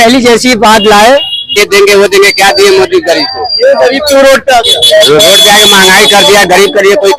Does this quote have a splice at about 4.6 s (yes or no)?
no